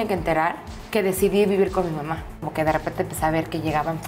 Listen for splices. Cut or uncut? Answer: cut